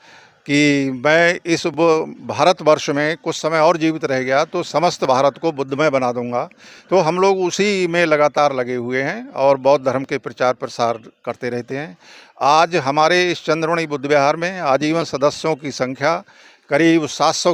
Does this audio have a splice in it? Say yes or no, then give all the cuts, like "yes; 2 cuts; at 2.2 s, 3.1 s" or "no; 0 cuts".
no; 0 cuts